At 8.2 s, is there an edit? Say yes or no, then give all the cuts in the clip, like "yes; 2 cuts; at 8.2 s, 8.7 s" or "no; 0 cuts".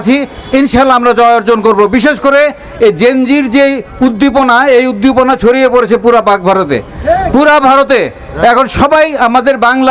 no; 0 cuts